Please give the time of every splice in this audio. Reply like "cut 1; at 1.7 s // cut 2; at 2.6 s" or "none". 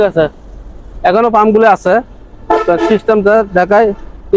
none

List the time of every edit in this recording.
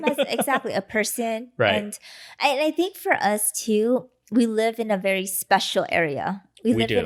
none

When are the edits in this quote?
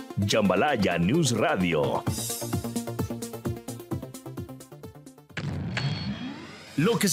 cut 1; at 5.3 s

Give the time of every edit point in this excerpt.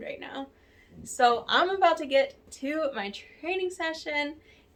none

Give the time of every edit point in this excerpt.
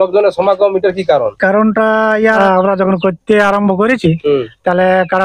cut 1; at 2.4 s

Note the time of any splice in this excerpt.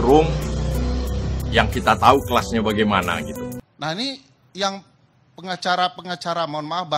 cut 1; at 3.6 s

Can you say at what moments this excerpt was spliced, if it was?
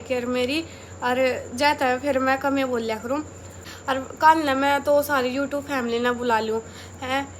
cut 1; at 3.6 s

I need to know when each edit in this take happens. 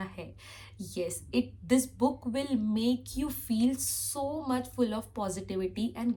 none

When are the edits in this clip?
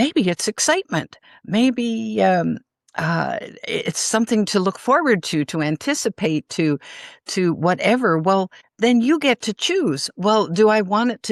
none

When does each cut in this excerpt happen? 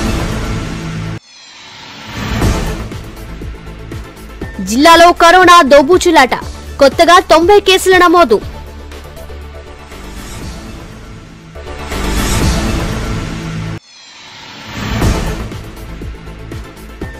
cut 1; at 1.1 s

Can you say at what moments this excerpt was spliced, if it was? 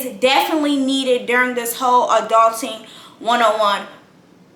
none

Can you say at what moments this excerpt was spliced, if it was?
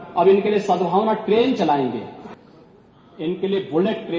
cut 1; at 2.2 s

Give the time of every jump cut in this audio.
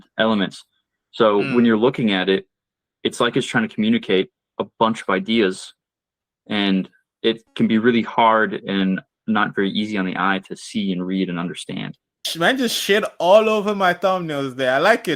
cut 1; at 12.2 s

